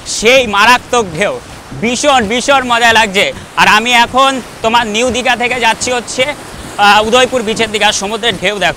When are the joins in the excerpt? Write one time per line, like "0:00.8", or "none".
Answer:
none